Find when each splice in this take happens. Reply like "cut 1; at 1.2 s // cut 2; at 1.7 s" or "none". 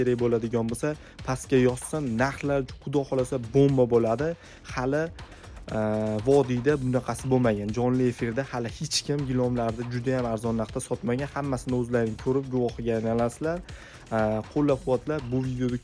none